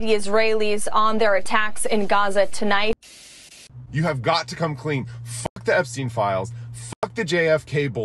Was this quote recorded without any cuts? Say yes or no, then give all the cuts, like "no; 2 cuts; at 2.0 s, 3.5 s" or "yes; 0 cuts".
no; 1 cut; at 3.2 s